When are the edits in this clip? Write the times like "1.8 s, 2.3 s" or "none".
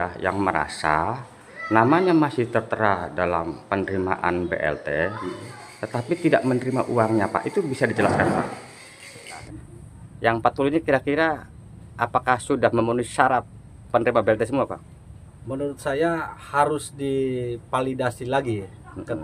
9.5 s